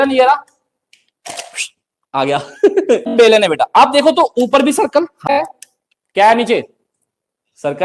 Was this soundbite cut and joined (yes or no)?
yes